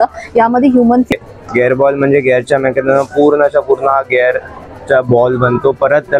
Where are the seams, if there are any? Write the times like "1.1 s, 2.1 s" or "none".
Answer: 1.1 s